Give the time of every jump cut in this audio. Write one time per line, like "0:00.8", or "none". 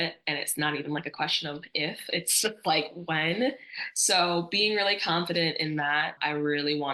none